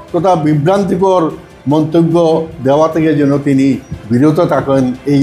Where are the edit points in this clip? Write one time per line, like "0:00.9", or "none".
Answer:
none